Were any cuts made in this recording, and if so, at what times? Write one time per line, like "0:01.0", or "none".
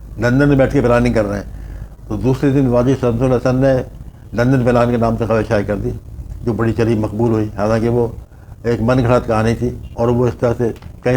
0:09.8